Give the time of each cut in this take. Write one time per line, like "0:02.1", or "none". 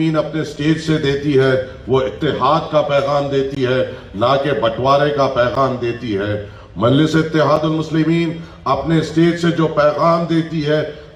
none